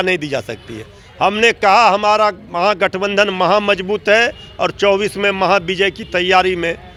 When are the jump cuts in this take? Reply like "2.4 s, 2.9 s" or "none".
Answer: none